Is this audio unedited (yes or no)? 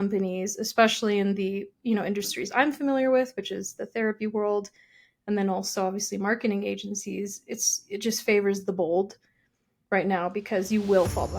yes